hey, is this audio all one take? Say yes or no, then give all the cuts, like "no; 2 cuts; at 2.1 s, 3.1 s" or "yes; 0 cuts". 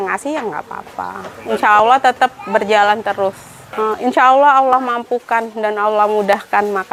yes; 0 cuts